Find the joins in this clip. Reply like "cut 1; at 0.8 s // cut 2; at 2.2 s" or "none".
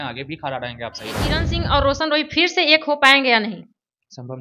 cut 1; at 1.4 s